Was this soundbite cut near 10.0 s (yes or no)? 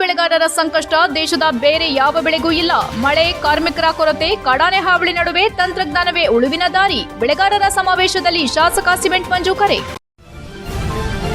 yes